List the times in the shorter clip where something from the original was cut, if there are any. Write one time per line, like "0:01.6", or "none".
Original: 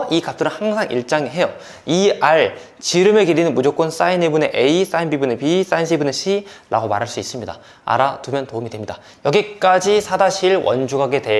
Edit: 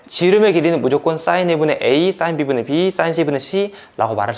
none